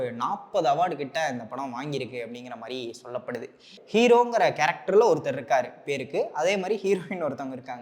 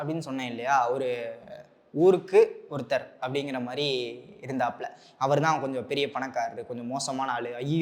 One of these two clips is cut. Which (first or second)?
first